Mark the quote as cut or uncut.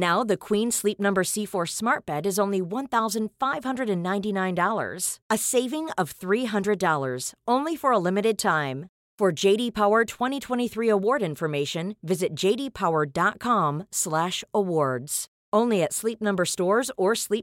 uncut